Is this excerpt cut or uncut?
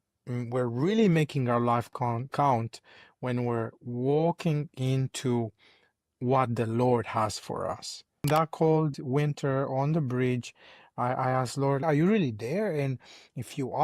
cut